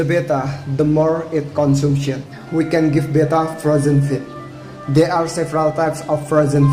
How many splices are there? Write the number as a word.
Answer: one